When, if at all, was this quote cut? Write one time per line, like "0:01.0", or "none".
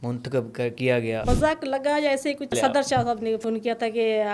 0:01.2
0:02.5
0:03.4